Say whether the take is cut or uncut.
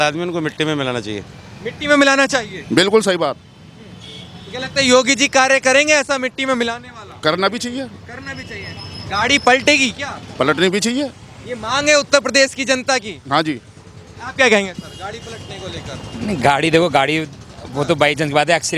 uncut